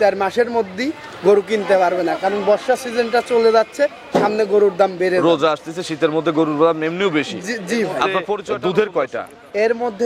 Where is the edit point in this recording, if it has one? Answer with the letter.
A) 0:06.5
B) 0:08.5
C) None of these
B